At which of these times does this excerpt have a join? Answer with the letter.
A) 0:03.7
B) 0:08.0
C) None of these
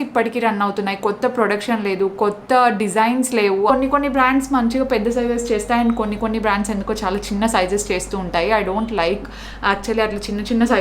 A